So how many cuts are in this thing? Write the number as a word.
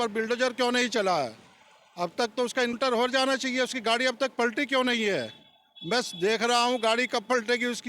one